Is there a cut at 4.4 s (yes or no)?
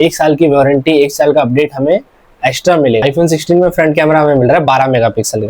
no